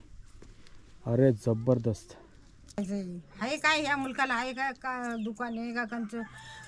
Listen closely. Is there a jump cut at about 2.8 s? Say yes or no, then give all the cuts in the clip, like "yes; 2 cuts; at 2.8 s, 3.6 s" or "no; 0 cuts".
yes; 1 cut; at 2.8 s